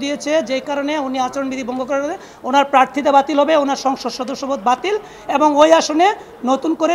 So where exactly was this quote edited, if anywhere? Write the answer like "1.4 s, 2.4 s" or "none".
none